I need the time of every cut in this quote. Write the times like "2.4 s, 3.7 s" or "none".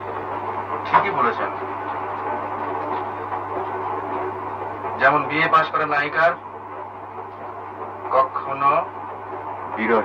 none